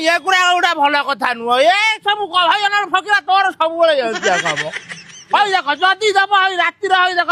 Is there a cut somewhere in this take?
no; 0 cuts

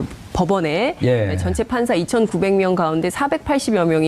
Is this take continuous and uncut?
no; 1 cut; at 2.1 s

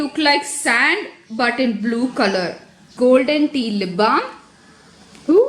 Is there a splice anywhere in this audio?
yes; 1 cut; at 2.9 s

